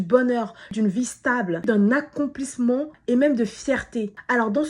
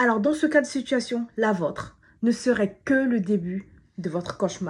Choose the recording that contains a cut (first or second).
first